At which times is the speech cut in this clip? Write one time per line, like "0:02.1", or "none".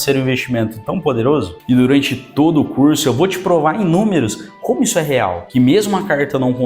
0:01.5
0:05.4